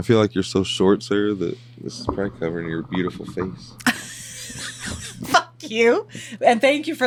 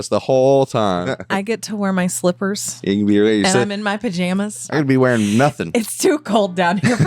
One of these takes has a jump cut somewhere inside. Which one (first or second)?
second